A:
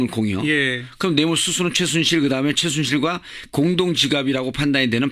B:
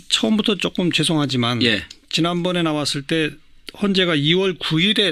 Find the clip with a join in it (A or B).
A